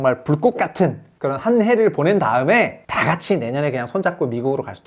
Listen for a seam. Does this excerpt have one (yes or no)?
yes